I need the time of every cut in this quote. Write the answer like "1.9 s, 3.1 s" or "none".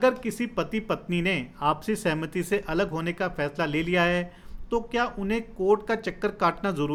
none